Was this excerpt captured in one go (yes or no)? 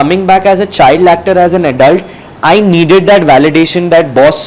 yes